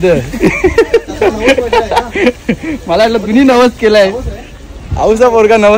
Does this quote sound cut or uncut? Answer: uncut